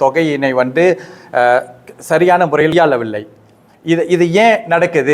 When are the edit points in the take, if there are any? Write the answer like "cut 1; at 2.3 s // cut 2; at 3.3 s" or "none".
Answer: cut 1; at 2.7 s